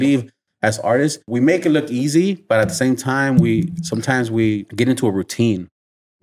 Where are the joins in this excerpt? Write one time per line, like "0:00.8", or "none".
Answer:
0:01.3
0:04.7